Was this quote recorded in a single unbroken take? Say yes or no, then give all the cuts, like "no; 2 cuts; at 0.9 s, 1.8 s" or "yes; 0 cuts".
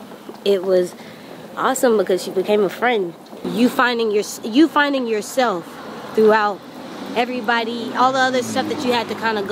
no; 1 cut; at 3.4 s